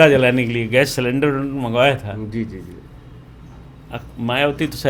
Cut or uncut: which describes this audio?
uncut